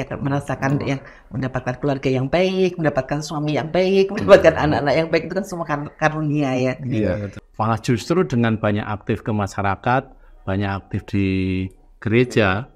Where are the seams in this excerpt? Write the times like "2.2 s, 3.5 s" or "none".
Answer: 7.4 s